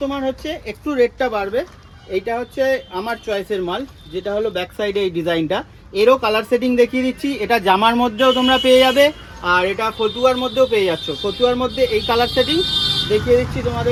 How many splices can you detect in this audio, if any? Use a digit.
0